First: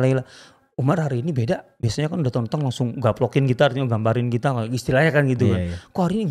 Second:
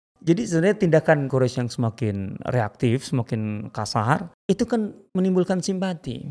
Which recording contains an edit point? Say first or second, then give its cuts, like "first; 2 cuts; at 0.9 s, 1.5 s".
second; 2 cuts; at 1.3 s, 4.3 s